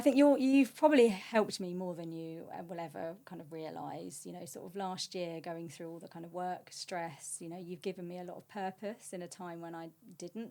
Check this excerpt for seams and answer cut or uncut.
uncut